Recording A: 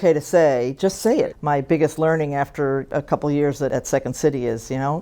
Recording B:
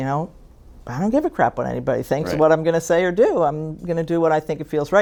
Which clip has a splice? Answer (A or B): A